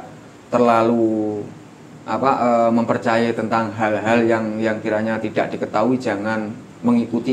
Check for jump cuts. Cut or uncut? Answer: uncut